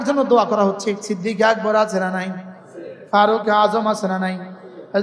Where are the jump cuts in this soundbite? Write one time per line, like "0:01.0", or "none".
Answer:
0:01.0